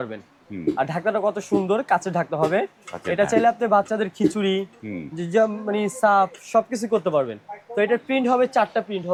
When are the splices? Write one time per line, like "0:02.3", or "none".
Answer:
none